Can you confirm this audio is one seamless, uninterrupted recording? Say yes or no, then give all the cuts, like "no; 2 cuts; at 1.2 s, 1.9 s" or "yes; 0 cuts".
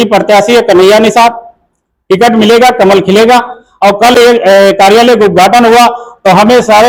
yes; 0 cuts